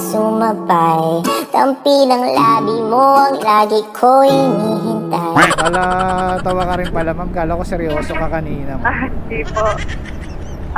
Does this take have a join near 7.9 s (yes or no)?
no